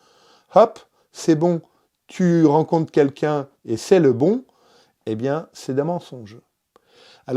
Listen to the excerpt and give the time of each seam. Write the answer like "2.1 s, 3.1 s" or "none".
none